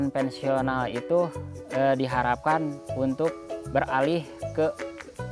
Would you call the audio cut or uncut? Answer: cut